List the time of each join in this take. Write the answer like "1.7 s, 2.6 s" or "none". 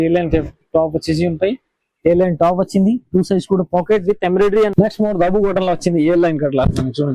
4.7 s